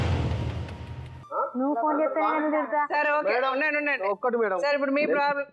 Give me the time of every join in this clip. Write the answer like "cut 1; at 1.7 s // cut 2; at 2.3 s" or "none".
cut 1; at 1.1 s